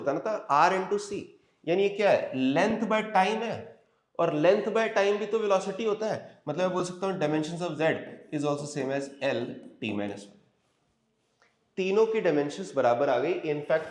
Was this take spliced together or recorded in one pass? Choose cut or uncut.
uncut